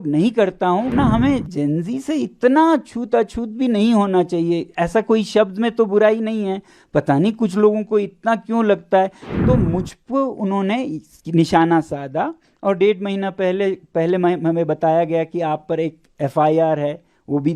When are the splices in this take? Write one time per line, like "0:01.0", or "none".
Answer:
0:00.9
0:09.3